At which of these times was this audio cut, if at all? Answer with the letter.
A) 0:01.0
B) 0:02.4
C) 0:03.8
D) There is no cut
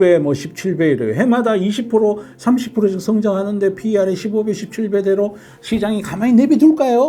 D